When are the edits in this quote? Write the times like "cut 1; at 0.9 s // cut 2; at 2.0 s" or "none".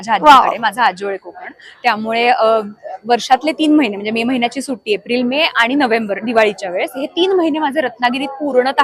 none